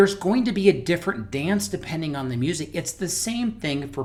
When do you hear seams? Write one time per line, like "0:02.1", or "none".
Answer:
none